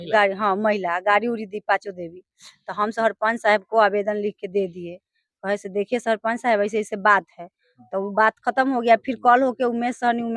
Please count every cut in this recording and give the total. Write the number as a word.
zero